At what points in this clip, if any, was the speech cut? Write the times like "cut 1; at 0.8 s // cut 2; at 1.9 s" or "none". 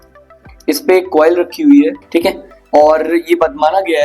cut 1; at 2.0 s